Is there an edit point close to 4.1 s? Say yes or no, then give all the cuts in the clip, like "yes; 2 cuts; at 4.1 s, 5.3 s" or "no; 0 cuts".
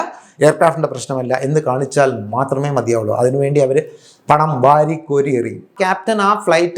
no; 1 cut; at 5.7 s